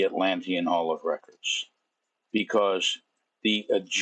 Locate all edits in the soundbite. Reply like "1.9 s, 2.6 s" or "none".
none